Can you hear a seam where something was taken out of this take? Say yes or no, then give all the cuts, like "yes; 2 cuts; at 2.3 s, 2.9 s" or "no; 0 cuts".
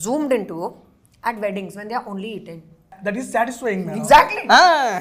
yes; 1 cut; at 3.0 s